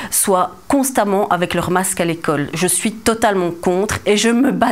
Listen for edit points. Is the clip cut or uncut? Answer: uncut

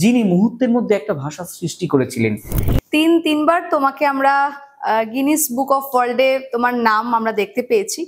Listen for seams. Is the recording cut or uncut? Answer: cut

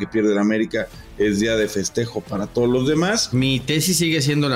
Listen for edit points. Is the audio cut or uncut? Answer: cut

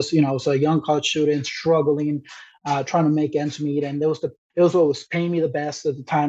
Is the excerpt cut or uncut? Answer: cut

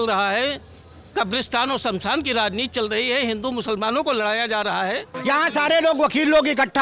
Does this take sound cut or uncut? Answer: cut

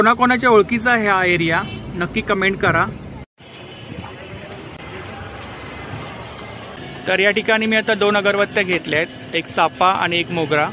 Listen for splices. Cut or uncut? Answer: cut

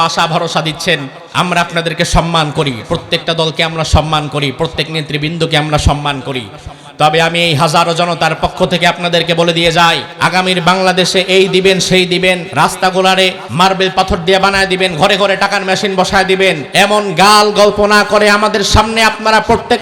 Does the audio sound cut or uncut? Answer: cut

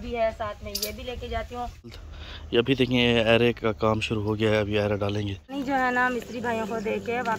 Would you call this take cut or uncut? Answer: cut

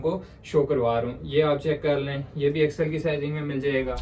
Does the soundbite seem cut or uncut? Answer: uncut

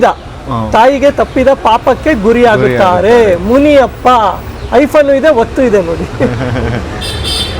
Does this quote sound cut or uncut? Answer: uncut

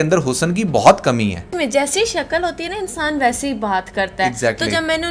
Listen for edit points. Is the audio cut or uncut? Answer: cut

